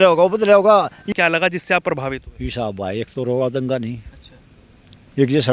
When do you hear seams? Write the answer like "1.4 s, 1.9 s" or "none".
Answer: 1.0 s